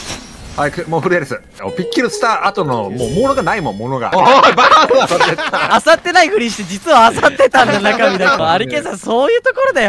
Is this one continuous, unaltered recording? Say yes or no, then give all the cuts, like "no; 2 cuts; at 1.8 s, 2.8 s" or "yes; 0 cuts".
no; 4 cuts; at 1.6 s, 4.1 s, 5.7 s, 8.4 s